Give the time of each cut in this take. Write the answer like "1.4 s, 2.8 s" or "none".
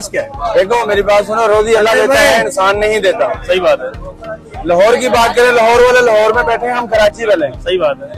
none